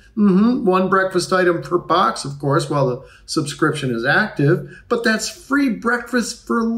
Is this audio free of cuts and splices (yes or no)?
yes